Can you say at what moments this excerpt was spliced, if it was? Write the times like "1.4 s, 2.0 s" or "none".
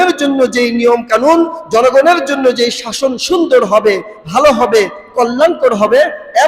none